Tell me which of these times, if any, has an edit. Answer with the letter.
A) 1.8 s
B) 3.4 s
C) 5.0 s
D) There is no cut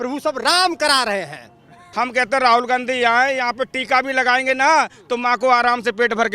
A